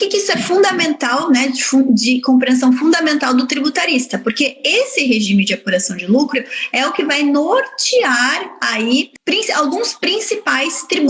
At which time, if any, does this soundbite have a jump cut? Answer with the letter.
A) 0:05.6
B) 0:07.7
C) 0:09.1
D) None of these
C